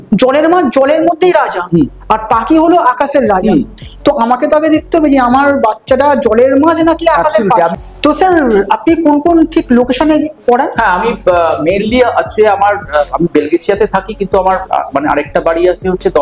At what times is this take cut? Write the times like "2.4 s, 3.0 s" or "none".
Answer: none